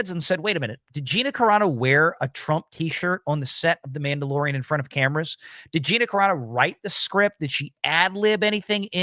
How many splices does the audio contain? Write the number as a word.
zero